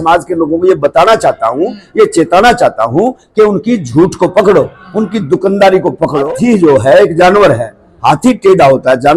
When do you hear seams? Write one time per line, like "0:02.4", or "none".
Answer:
0:06.3